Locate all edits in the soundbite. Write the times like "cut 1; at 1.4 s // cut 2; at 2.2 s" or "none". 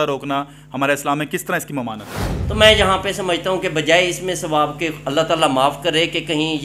cut 1; at 2.3 s